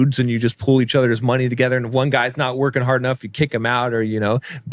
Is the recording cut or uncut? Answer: uncut